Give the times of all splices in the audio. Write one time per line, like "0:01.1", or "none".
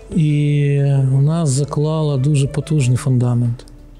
none